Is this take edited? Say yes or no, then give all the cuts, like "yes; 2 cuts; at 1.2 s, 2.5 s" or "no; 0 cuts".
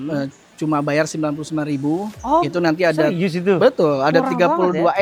no; 0 cuts